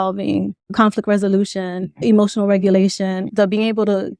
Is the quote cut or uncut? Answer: cut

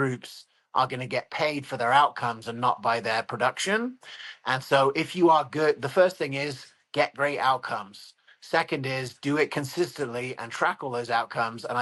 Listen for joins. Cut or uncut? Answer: uncut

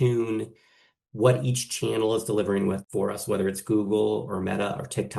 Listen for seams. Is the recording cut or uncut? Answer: cut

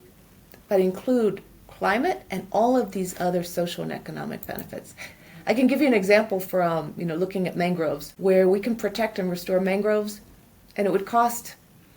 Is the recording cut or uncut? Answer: cut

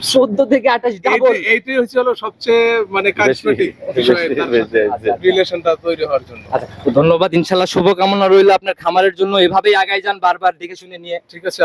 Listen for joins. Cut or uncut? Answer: uncut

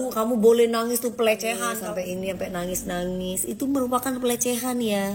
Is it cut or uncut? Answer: cut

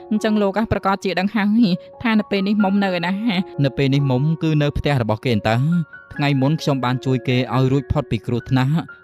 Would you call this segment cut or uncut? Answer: cut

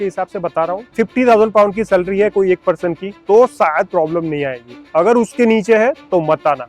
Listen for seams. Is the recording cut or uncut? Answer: cut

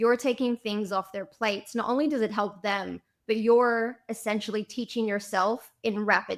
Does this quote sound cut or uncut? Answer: uncut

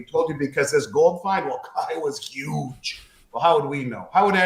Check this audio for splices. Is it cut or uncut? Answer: uncut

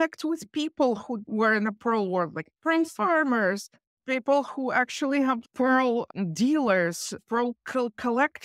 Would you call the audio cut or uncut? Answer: cut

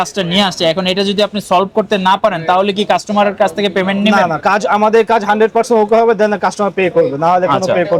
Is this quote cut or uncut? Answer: uncut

